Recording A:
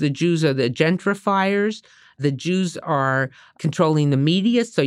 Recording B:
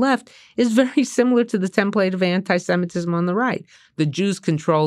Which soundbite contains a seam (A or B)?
A